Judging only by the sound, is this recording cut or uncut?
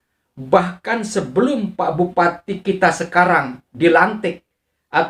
uncut